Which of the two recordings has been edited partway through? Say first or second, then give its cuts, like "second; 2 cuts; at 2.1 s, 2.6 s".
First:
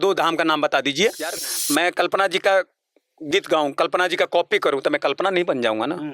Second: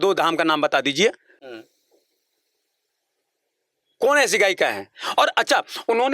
first; 1 cut; at 1.5 s